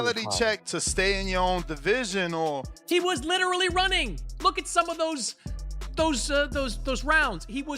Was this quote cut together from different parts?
yes; 1 cut; at 2.7 s

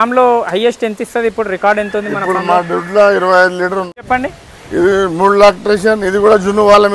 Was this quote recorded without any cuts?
no; 1 cut; at 4.0 s

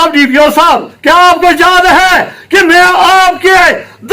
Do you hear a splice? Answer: yes; 1 cut; at 0.9 s

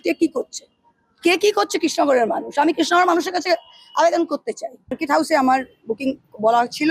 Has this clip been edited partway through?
yes; 1 cut; at 5.0 s

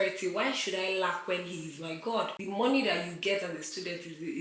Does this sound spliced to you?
yes; 1 cut; at 2.4 s

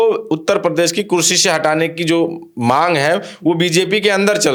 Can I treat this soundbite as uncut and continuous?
yes; 0 cuts

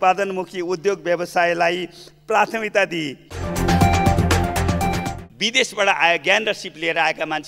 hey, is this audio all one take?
no; 2 cuts; at 3.6 s, 5.1 s

